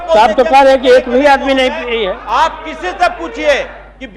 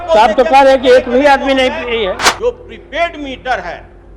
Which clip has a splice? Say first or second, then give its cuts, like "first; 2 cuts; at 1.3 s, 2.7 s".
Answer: second; 1 cut; at 2.2 s